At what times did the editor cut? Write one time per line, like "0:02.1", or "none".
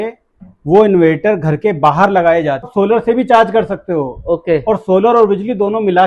0:02.7